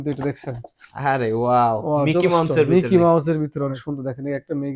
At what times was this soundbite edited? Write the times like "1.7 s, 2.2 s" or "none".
3.8 s